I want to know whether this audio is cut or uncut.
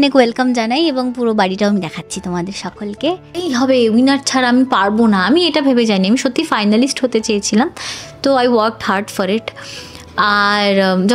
cut